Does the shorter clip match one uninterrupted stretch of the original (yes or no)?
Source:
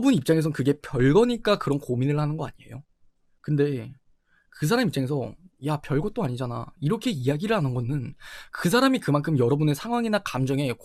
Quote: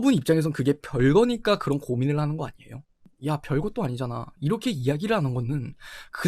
no